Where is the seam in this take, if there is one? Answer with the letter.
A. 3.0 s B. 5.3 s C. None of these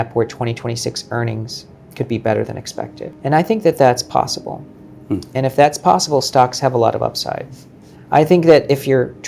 A